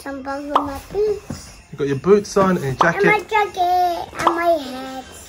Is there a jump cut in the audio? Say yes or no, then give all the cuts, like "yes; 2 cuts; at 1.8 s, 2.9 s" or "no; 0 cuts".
no; 0 cuts